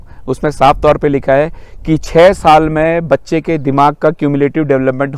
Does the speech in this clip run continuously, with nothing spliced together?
yes; 0 cuts

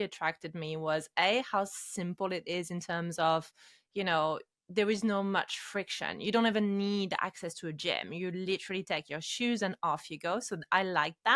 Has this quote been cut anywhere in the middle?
no; 0 cuts

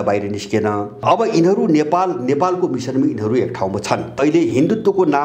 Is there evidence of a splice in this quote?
yes; 2 cuts; at 1.0 s, 4.2 s

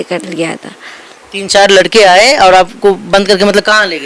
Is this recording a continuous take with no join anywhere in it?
yes; 0 cuts

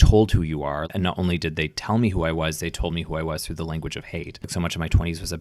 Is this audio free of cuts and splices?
no; 2 cuts; at 0.8 s, 4.5 s

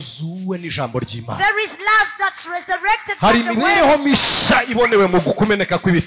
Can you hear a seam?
no; 0 cuts

